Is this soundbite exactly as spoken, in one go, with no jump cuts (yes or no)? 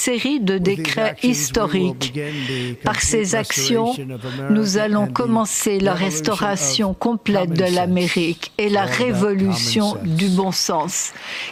yes